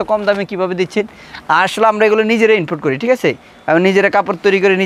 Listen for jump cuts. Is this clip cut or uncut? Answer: uncut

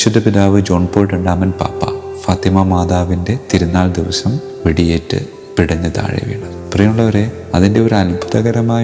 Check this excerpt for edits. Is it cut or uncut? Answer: uncut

